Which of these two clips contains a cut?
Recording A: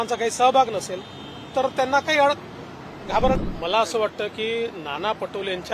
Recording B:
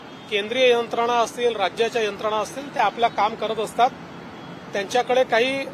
A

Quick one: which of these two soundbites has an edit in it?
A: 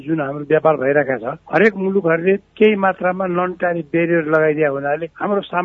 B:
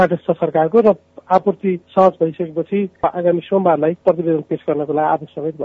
B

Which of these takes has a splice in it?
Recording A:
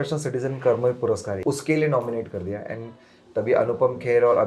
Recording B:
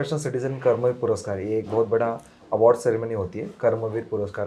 A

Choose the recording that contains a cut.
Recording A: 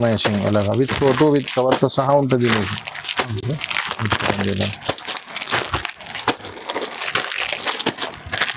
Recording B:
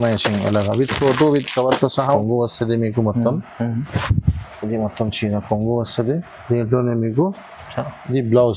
B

